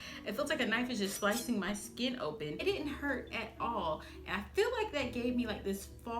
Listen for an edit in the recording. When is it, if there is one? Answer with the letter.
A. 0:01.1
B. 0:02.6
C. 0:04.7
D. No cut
B